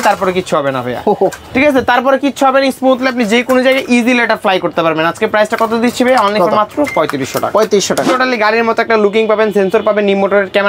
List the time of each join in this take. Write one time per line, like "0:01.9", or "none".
0:08.1